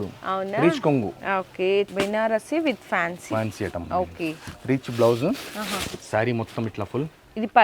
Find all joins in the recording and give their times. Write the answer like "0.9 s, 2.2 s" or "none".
1.9 s